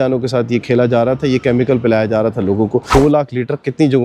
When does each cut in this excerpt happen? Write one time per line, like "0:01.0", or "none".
0:02.9